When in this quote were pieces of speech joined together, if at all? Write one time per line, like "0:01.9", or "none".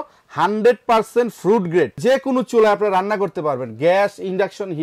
0:02.0